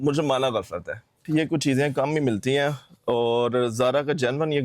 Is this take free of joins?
no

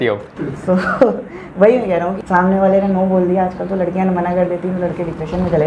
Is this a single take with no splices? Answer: no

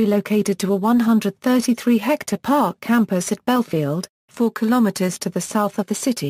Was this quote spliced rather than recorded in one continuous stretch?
yes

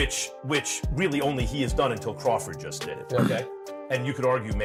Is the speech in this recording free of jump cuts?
yes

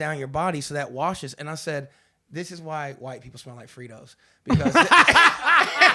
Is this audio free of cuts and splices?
yes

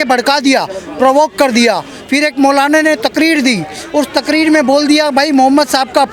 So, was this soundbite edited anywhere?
no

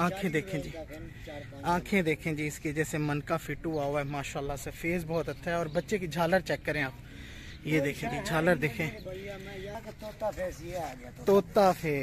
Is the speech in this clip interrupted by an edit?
yes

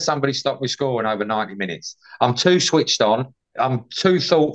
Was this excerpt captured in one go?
no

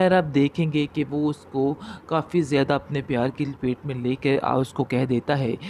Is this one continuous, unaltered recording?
yes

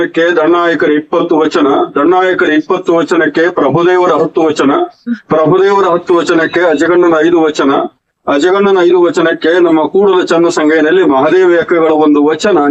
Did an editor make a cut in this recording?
no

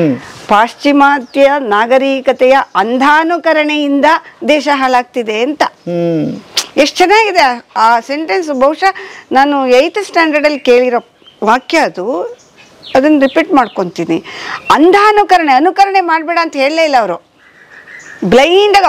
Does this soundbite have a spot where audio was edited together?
no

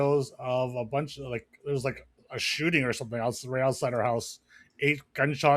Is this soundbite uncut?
yes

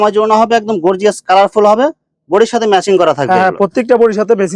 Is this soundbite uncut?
yes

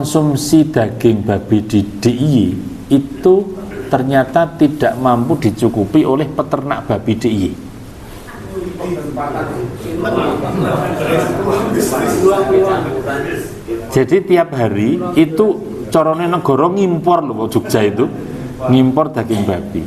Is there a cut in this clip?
no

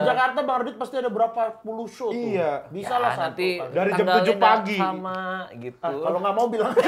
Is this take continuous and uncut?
yes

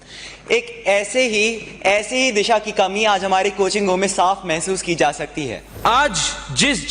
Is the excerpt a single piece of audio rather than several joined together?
no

